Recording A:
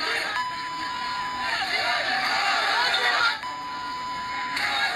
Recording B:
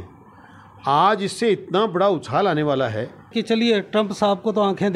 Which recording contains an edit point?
B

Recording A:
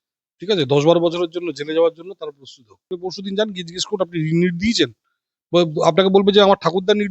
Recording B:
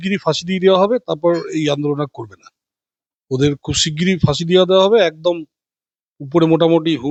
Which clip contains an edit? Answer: A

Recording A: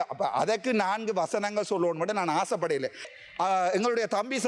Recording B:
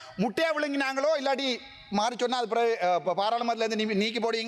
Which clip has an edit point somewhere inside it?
A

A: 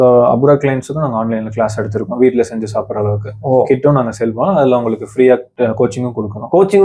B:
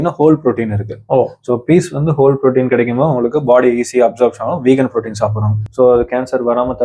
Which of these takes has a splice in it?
B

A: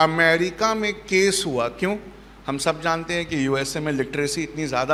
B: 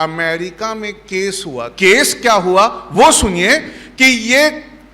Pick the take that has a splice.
B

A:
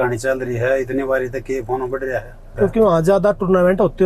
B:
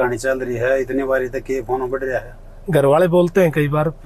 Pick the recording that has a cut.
A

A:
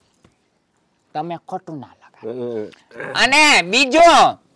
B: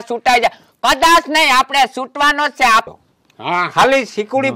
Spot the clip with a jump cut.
B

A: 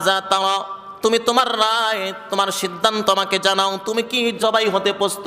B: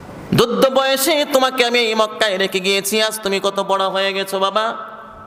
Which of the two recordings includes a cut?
A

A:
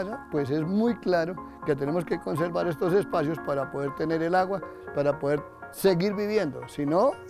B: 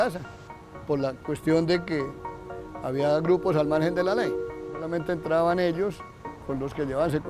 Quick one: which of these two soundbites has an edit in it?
B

